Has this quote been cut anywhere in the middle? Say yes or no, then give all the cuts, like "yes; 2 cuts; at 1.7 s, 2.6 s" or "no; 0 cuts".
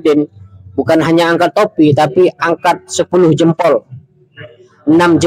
no; 0 cuts